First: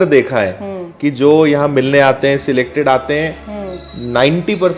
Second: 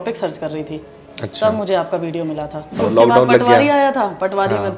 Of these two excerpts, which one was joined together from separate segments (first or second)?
second